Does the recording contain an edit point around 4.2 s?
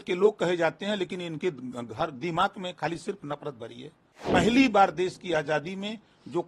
yes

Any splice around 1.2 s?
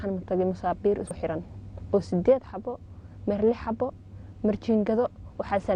yes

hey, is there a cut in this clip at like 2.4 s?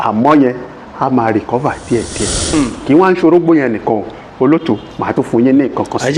yes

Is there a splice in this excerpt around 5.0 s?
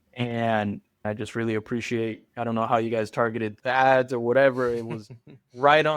no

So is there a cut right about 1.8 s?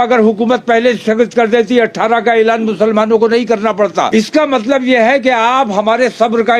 no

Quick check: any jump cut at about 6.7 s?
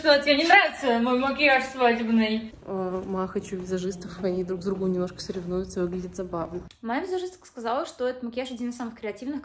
yes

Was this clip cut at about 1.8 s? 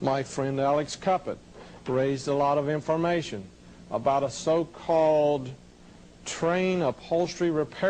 no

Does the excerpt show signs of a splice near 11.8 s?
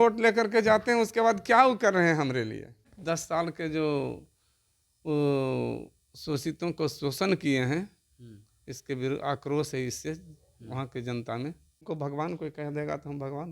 yes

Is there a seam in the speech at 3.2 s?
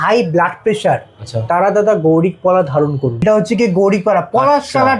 yes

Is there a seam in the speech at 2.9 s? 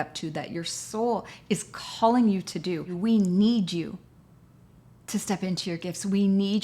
yes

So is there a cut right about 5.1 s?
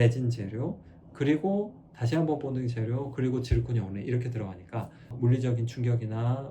yes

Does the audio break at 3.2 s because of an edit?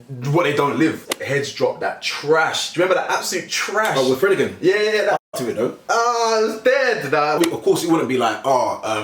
no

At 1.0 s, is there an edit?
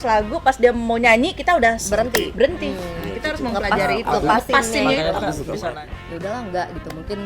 no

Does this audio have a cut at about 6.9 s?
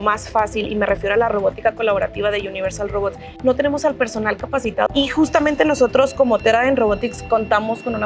no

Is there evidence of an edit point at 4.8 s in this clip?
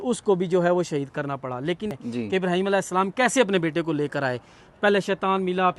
no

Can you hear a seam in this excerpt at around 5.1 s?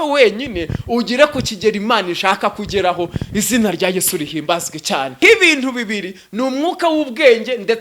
yes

